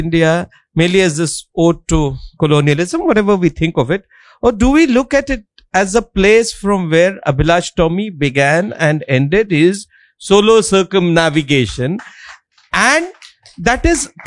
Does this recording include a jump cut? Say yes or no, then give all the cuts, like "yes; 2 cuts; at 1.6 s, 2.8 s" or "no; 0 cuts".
no; 0 cuts